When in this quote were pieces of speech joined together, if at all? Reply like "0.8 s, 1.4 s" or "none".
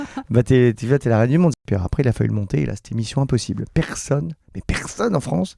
1.6 s